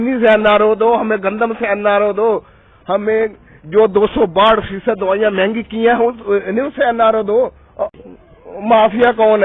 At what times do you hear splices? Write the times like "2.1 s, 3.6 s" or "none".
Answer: 7.9 s